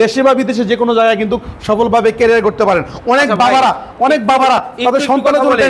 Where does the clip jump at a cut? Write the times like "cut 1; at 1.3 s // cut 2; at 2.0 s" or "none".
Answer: none